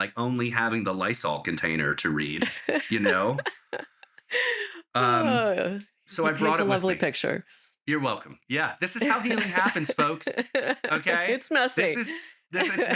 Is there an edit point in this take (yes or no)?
no